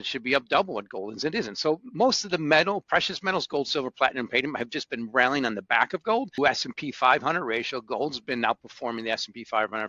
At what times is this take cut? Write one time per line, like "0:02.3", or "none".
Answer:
0:06.4

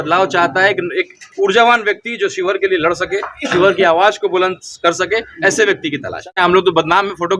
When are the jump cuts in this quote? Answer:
0:06.1

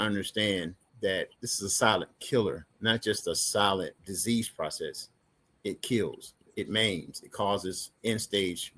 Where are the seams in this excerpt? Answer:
0:01.4
0:02.7
0:04.0

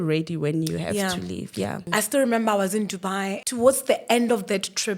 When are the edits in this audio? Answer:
0:01.8
0:03.4

